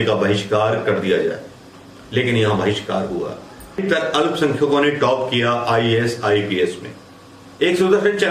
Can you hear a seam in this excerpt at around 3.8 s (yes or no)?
yes